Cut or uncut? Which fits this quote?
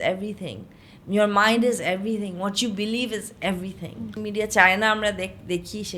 cut